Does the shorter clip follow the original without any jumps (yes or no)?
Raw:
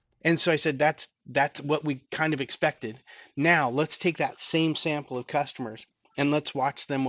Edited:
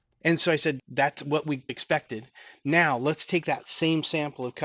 no